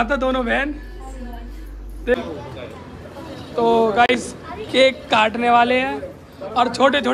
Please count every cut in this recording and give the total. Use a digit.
1